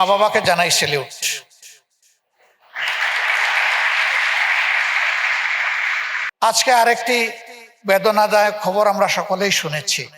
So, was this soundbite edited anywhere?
yes; 1 cut; at 6.2 s

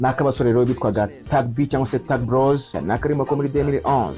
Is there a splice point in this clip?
yes; 1 cut; at 2.8 s

